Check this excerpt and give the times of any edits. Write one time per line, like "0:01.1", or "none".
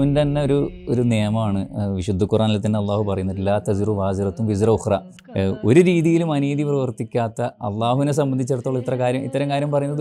0:05.2